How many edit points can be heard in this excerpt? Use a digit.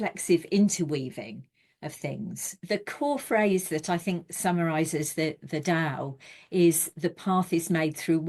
1